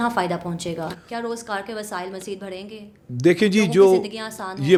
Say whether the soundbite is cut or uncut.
uncut